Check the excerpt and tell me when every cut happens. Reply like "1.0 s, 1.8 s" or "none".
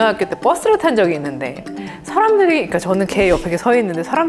1.7 s